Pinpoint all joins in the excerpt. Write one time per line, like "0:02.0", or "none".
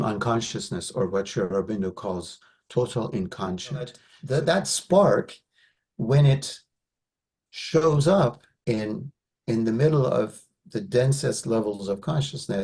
0:04.1